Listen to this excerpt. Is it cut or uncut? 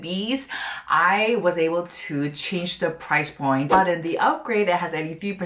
cut